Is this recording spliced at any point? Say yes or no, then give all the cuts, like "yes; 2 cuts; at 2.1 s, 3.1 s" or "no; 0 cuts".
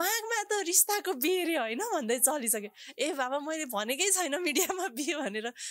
no; 0 cuts